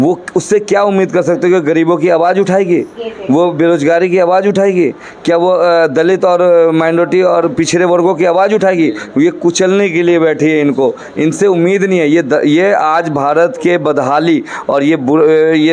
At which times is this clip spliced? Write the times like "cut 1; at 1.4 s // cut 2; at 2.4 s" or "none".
none